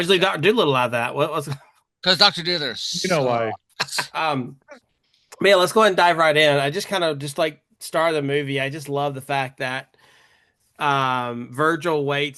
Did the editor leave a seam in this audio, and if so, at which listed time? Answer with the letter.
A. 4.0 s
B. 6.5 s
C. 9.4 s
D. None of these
A